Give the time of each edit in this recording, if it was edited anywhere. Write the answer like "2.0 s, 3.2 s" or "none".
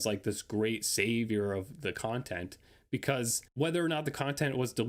3.4 s